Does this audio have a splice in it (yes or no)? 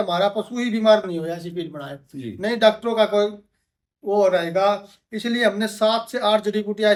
no